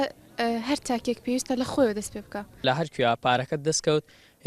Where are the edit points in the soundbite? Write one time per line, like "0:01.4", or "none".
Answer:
0:02.6